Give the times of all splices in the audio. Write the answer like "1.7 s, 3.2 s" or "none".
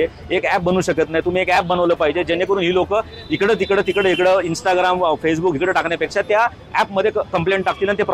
none